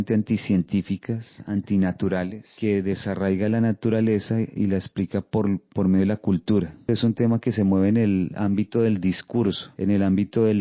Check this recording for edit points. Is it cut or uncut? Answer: cut